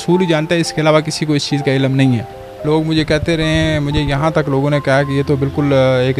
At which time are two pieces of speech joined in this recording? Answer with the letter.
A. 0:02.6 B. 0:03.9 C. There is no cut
A